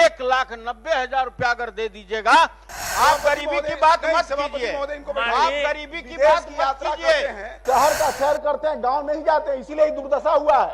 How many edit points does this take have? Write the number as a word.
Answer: two